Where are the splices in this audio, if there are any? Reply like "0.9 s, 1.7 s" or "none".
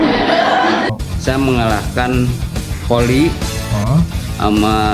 1.0 s